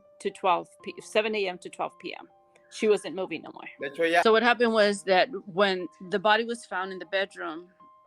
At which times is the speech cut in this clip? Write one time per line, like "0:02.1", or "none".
0:04.2